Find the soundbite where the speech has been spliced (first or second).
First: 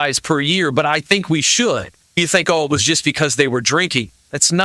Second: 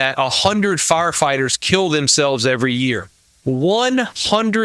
first